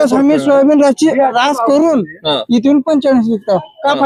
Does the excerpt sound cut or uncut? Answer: uncut